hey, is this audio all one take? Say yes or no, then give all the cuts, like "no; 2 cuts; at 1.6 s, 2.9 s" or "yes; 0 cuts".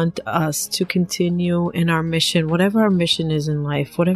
yes; 0 cuts